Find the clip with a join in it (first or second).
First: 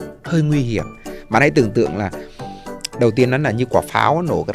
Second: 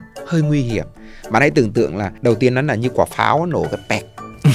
second